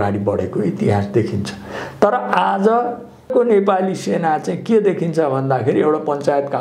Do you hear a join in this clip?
yes; 1 cut; at 3.3 s

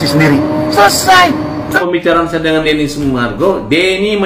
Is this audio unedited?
no; 1 cut; at 1.7 s

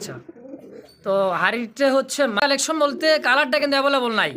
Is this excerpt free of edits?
no; 1 cut; at 2.4 s

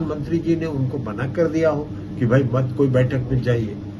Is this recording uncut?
yes; 0 cuts

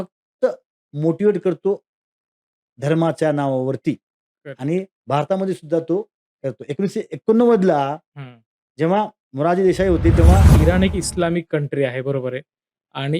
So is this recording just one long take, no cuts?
no; 1 cut; at 10.5 s

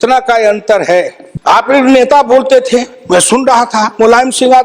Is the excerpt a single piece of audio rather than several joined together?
no; 1 cut; at 1.2 s

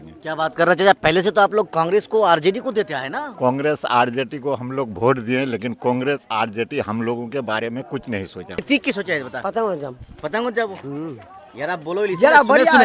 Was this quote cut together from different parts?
yes; 1 cut; at 8.6 s

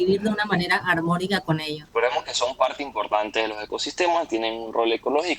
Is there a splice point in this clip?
yes; 1 cut; at 1.8 s

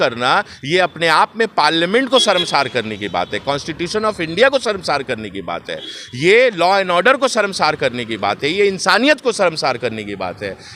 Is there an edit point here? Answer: no; 0 cuts

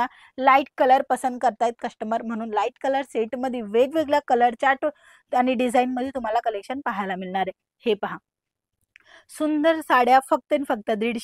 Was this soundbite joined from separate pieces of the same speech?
no; 0 cuts

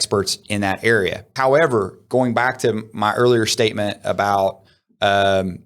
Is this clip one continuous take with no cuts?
no; 1 cut; at 1.2 s

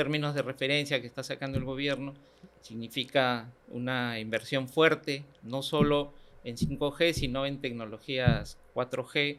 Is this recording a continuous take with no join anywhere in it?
yes; 0 cuts

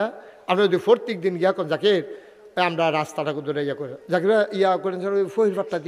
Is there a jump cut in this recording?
no; 0 cuts

